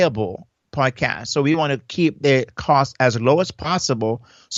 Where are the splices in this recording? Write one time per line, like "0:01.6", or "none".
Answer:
none